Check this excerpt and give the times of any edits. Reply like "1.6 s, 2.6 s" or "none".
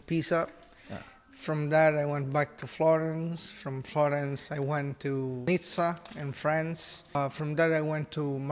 5.5 s, 7.2 s